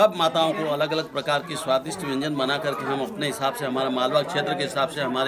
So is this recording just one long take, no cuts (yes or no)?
yes